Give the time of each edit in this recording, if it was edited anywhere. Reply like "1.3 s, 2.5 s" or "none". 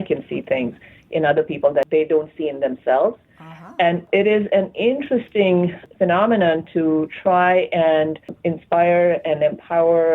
1.9 s, 4.0 s, 5.8 s, 8.4 s